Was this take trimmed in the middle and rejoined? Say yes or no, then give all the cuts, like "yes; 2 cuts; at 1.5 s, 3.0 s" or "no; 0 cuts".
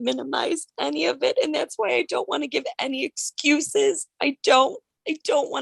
no; 0 cuts